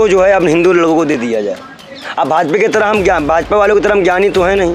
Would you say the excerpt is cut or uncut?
cut